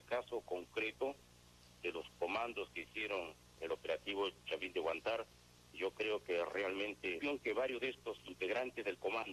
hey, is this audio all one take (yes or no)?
yes